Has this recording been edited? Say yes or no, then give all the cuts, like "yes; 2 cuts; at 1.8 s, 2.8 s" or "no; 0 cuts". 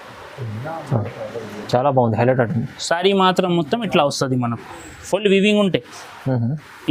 no; 0 cuts